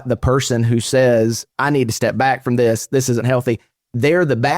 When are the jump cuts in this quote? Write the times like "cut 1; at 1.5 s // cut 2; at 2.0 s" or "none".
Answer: cut 1; at 1.4 s